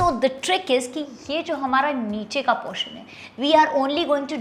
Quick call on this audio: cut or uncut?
uncut